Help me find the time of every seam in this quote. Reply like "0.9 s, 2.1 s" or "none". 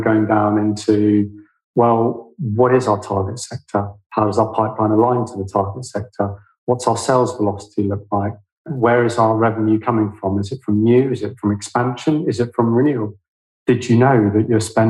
8.7 s